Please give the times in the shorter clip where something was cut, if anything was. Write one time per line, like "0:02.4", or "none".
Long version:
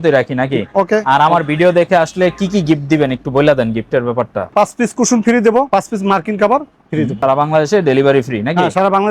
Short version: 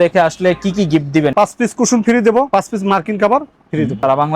0:01.3